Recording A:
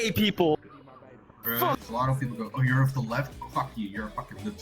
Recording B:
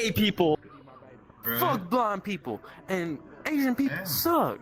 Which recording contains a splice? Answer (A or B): A